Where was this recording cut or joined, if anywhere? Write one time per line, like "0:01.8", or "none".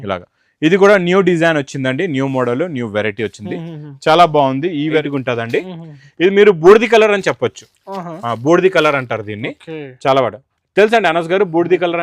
0:05.0